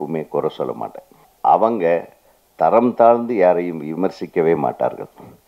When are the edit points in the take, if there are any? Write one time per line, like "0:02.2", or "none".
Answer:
0:01.2